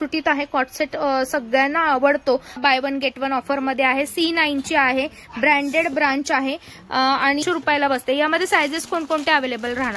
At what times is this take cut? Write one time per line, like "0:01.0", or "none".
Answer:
0:02.6
0:07.4